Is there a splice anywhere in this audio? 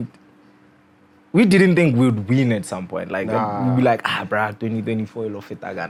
no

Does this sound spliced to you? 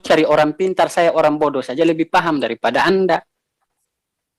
no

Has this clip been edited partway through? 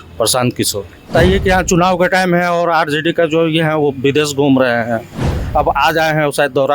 yes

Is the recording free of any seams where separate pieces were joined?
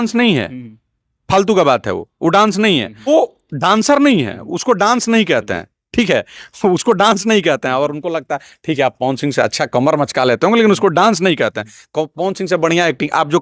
no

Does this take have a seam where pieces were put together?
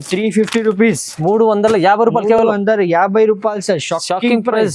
no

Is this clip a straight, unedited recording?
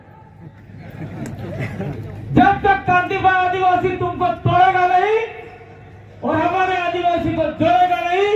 yes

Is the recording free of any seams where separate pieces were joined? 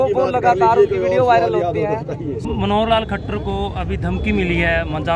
no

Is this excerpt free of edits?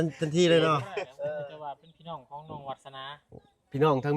no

